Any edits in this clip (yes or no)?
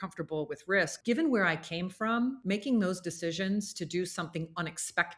yes